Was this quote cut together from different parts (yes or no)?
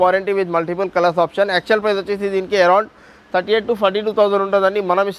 no